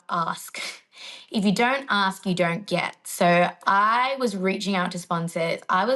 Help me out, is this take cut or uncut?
uncut